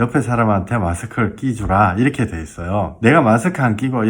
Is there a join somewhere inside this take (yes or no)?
yes